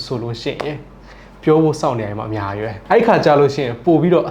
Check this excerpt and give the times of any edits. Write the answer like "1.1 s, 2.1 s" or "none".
2.8 s